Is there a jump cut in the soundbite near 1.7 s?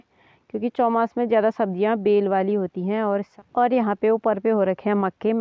no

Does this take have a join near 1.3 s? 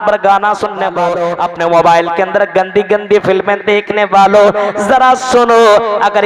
yes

